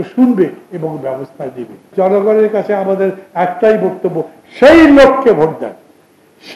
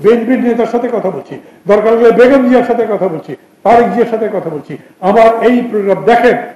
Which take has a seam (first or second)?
first